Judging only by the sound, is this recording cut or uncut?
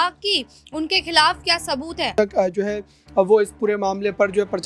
cut